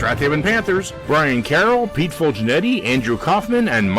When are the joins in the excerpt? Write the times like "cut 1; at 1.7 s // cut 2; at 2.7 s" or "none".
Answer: cut 1; at 0.9 s